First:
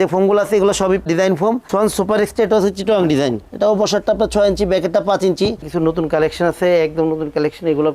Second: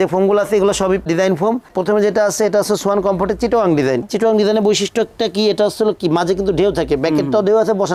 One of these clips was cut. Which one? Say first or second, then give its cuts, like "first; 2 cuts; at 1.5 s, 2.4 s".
first; 2 cuts; at 1.7 s, 5.7 s